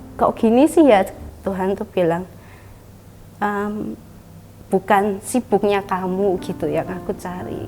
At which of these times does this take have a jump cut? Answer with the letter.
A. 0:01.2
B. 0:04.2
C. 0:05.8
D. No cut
A